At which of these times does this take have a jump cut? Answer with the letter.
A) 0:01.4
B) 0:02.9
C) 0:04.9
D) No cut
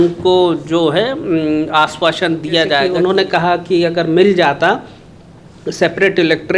B